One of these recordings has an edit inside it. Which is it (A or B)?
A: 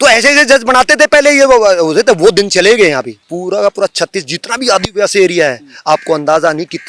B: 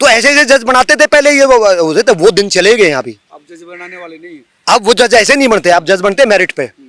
A